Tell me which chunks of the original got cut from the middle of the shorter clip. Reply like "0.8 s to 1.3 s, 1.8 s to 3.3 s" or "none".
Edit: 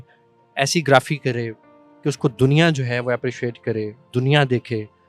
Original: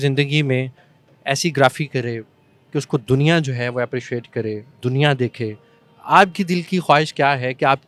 none